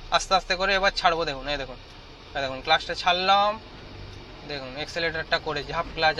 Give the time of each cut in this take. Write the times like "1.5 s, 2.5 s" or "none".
none